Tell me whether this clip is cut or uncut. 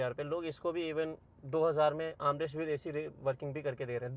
uncut